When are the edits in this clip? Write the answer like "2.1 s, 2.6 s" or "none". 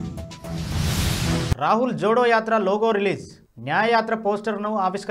1.5 s